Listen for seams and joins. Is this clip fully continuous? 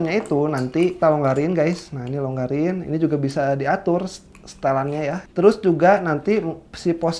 no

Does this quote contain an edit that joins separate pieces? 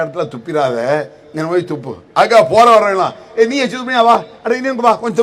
no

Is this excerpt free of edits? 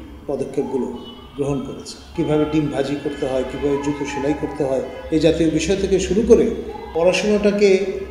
no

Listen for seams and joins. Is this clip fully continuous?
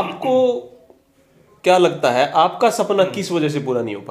yes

